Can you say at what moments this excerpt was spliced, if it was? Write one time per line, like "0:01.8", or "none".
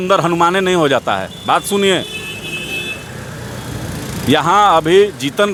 none